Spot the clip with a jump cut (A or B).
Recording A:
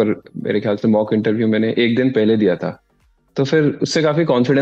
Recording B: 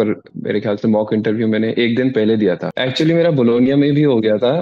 B